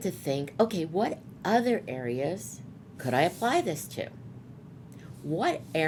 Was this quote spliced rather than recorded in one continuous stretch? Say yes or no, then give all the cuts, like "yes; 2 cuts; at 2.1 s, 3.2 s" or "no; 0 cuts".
no; 0 cuts